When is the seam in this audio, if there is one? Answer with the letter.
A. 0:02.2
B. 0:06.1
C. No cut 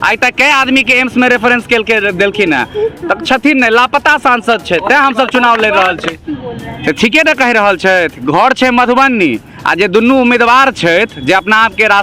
B